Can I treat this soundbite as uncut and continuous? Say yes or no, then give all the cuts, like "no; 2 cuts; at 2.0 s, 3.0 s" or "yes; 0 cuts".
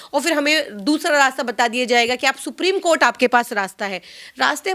yes; 0 cuts